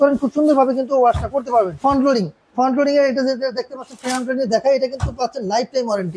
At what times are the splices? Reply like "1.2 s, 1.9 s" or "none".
1.7 s